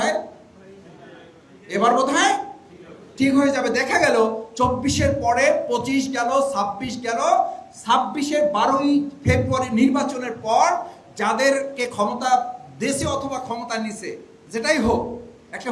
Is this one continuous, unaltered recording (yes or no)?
no